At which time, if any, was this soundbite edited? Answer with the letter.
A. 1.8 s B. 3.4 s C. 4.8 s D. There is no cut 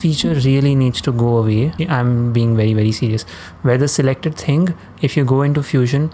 A